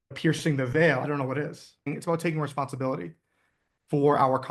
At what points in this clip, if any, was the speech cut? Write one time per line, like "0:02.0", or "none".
0:01.9

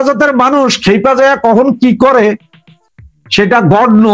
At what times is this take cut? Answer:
none

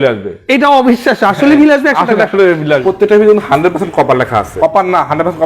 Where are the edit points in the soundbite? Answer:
0:02.8
0:04.5

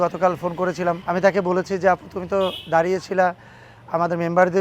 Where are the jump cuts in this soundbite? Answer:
0:01.0

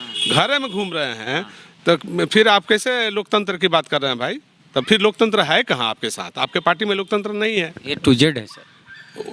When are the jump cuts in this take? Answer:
none

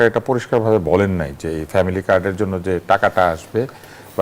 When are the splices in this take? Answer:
none

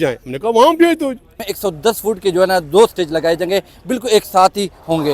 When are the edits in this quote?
0:01.3

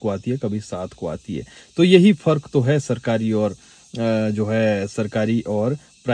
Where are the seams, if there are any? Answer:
none

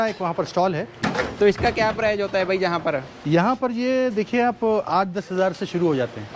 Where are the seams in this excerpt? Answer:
0:01.0

